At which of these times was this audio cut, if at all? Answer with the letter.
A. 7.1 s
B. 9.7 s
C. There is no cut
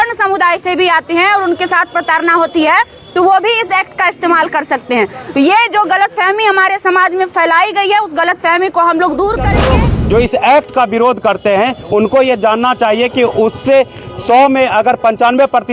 B